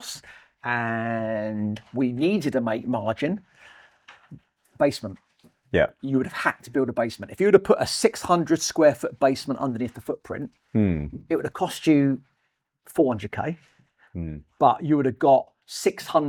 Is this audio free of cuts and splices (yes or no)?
yes